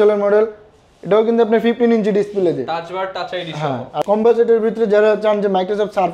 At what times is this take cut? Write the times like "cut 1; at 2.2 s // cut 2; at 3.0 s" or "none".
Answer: cut 1; at 4.0 s